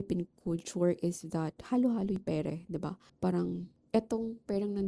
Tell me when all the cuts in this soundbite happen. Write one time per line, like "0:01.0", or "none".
0:03.0
0:03.7